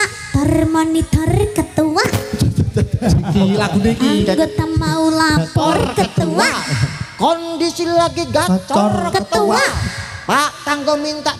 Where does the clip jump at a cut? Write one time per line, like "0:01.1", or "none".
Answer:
none